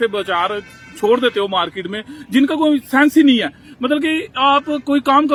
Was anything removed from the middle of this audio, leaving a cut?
no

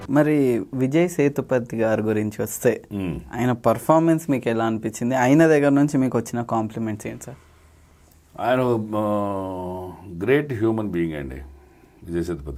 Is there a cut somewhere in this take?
no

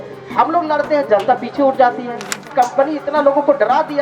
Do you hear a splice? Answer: yes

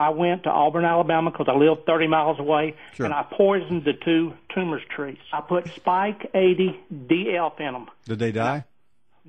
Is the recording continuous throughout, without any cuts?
no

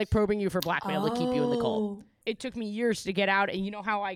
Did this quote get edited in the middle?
yes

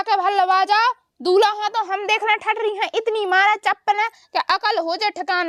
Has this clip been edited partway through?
no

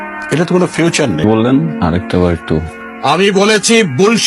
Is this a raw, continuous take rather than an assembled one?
no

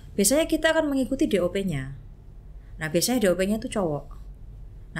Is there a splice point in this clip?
no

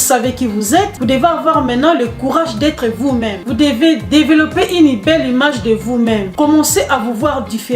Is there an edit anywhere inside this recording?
yes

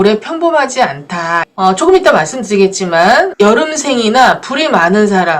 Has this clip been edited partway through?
yes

